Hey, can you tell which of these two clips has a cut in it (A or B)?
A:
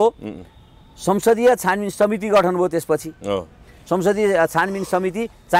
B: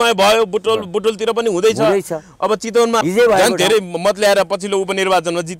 B